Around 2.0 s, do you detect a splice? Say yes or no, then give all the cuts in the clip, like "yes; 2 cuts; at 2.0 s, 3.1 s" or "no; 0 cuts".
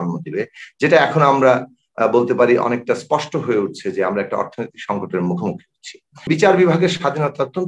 no; 1 cut; at 6.3 s